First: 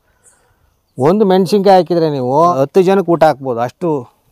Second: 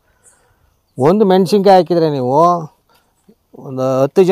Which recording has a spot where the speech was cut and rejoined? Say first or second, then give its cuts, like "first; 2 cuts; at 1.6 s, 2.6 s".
first; 1 cut; at 2.5 s